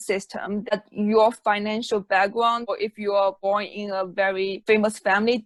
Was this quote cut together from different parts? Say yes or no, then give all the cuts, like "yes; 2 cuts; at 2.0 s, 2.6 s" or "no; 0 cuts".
no; 0 cuts